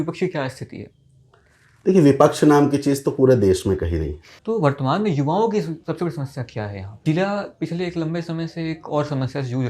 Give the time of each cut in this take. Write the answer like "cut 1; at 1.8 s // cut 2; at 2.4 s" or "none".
cut 1; at 4.3 s // cut 2; at 6.9 s